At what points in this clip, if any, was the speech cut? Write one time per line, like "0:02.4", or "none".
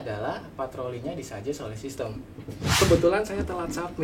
0:02.7